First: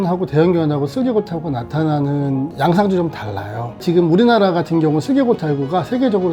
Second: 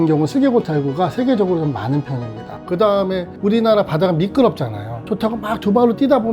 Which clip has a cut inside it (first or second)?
second